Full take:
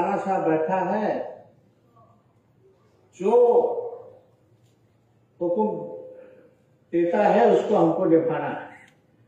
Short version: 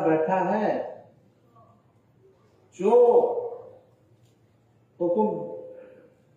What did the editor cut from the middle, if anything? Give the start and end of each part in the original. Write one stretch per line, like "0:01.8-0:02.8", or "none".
none